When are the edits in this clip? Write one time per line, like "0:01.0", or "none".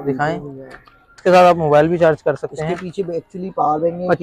0:01.2